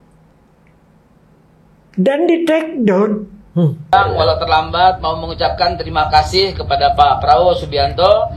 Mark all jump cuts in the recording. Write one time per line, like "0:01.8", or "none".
0:03.9